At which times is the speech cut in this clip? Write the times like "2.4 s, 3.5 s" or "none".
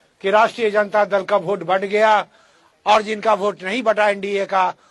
none